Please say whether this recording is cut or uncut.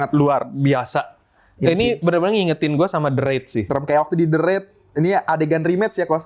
cut